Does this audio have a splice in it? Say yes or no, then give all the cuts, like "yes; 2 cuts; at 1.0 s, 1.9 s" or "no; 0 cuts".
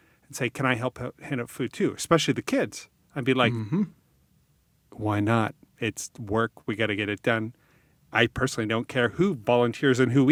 no; 0 cuts